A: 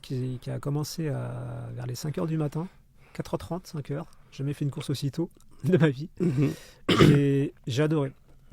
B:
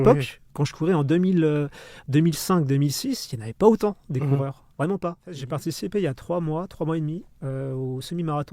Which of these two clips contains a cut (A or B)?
B